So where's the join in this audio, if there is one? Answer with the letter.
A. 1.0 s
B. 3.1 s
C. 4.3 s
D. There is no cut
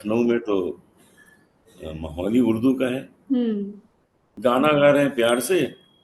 C